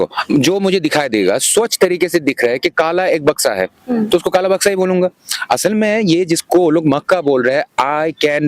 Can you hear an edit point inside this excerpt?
no; 0 cuts

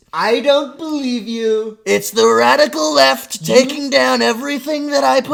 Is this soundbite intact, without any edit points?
yes; 0 cuts

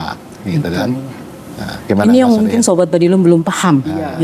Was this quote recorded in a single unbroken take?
yes; 0 cuts

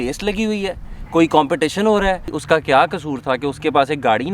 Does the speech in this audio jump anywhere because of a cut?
yes; 1 cut; at 2.3 s

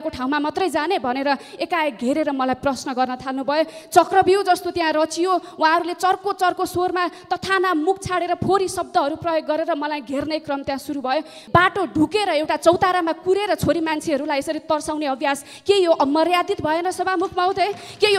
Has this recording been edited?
yes; 1 cut; at 11.4 s

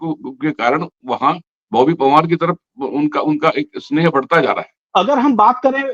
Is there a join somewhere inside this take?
yes; 1 cut; at 4.8 s

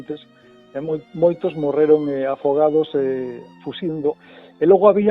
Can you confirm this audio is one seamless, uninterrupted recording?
no; 1 cut; at 4.1 s

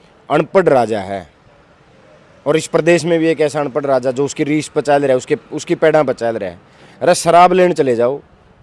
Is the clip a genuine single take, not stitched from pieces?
yes; 0 cuts

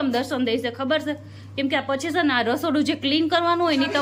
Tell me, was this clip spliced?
no; 0 cuts

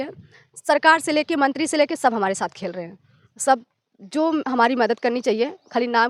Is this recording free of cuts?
yes; 0 cuts

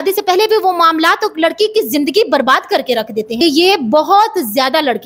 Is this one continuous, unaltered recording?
no; 1 cut; at 3.3 s

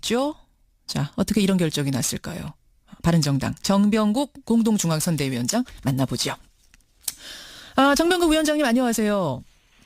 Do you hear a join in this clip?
no; 0 cuts

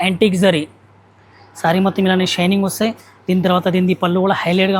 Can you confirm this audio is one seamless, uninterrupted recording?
yes; 0 cuts

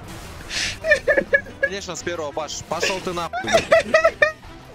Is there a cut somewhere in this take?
no; 0 cuts

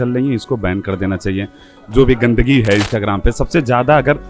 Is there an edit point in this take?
no; 0 cuts

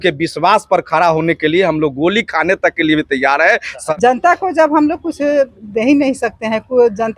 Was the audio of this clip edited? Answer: yes; 1 cut; at 3.8 s

